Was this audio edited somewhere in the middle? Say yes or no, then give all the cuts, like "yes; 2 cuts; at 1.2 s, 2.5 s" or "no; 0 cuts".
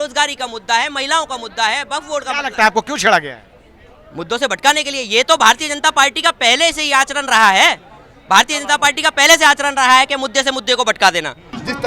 no; 0 cuts